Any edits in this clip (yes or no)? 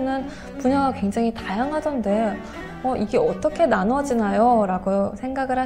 no